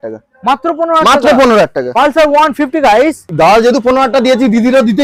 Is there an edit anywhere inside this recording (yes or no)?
yes